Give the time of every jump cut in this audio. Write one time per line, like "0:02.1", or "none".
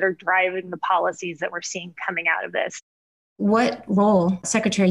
0:02.8